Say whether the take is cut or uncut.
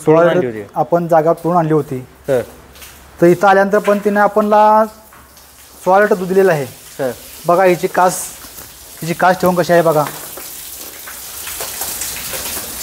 uncut